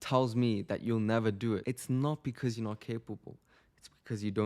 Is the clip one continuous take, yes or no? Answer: no